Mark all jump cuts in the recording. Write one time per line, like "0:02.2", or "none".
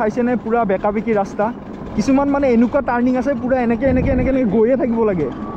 none

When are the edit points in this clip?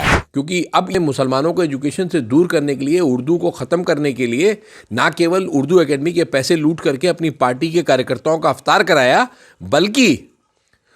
0:01.0

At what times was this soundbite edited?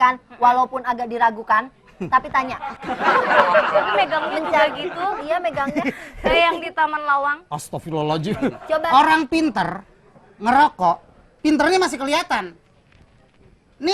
0:08.8

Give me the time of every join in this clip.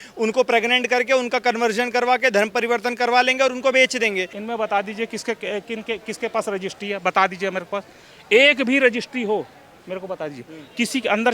0:04.4

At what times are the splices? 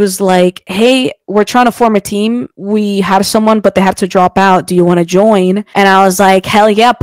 none

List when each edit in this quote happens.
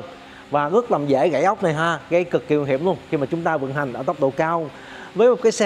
none

